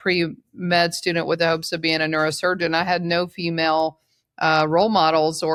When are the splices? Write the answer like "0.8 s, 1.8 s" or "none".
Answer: none